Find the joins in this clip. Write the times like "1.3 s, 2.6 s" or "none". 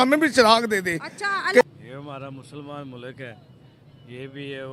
1.6 s